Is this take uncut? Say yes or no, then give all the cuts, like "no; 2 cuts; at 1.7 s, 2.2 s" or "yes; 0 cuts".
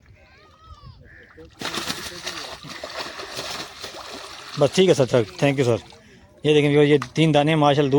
yes; 0 cuts